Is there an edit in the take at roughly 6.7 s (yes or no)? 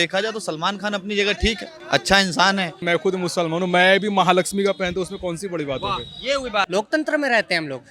yes